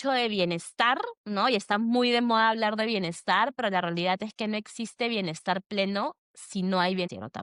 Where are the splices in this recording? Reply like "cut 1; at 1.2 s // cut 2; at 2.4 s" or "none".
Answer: none